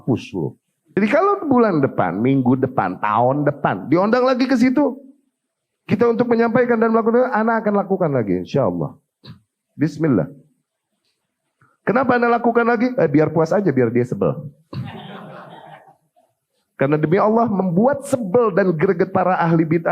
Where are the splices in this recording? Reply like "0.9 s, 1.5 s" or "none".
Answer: 1.0 s